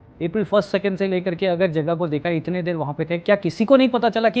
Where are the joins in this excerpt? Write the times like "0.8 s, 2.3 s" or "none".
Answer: none